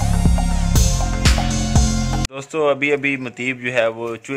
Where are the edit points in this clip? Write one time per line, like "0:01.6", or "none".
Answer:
0:02.2